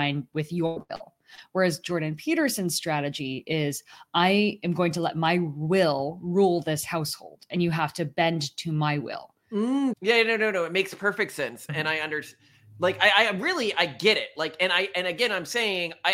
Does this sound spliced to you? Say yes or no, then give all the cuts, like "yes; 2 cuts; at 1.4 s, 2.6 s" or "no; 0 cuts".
yes; 1 cut; at 9.9 s